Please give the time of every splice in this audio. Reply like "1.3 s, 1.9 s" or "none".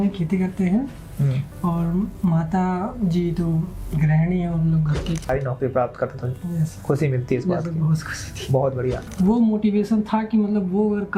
5.3 s, 9.1 s